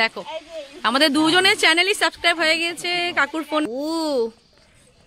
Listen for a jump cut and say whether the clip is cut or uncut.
cut